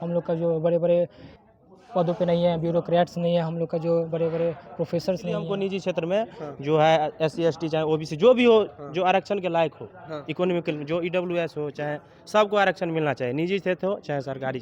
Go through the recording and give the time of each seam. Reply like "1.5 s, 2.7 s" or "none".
5.5 s

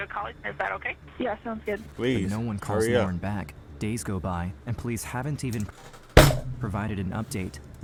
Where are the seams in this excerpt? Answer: none

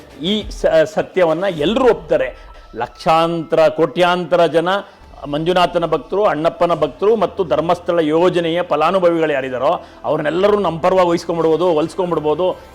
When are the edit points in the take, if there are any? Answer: 2.6 s

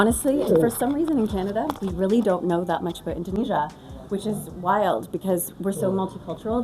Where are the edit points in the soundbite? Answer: 1.8 s, 3.3 s

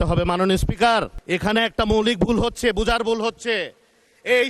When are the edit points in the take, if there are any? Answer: none

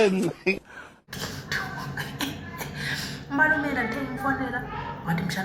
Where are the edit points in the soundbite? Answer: 1.1 s

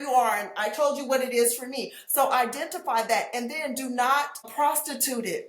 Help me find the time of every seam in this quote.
4.4 s

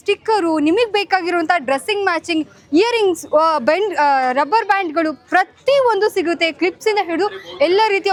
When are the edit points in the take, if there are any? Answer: none

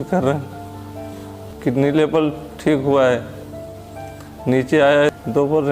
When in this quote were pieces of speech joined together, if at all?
1.4 s

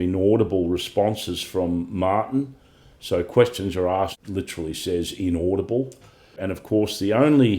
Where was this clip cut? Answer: 4.2 s, 6.4 s

